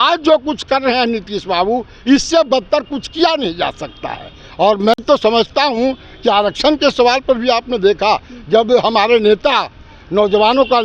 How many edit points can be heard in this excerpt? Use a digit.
0